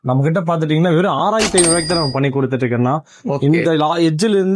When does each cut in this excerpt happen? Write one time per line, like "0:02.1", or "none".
none

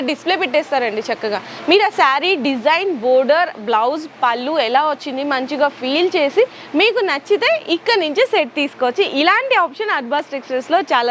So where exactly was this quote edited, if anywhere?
none

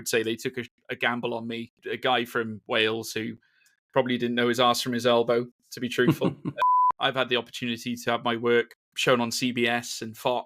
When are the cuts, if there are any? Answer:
0:01.8
0:06.6
0:08.8

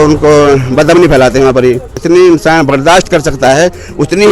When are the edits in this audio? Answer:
0:01.9

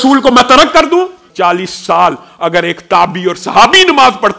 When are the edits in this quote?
0:01.3

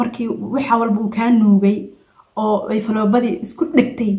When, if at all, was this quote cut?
none

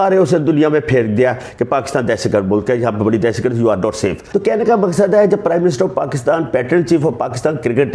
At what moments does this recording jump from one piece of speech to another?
0:04.2

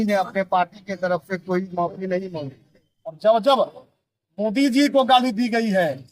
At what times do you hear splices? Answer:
0:03.2

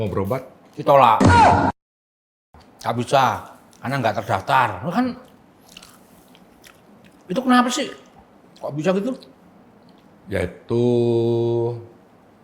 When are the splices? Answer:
none

